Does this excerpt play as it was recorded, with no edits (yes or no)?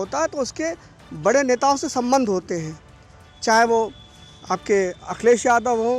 yes